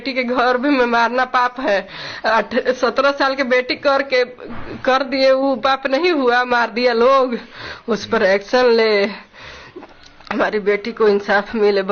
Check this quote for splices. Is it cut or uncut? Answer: uncut